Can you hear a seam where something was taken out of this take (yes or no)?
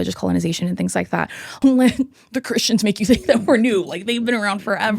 yes